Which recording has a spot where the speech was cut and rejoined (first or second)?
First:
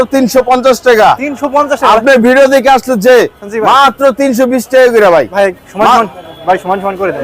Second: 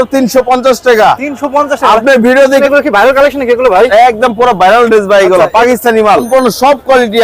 second